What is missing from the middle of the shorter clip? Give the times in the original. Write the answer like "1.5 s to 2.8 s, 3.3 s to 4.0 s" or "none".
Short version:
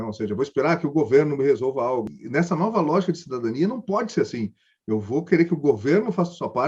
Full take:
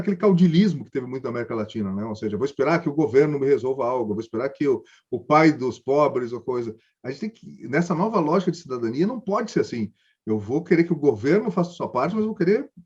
4.1 s to 7.5 s